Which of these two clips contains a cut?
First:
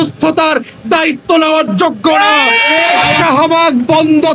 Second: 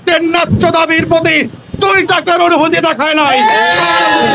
first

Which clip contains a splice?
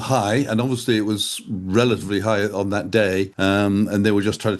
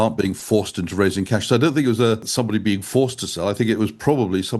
second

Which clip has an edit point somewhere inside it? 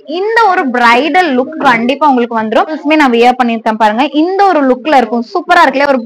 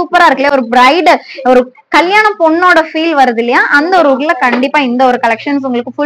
first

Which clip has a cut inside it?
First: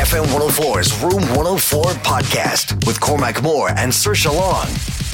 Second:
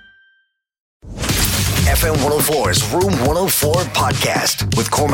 second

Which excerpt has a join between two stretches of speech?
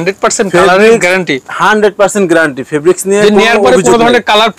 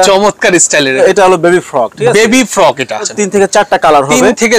second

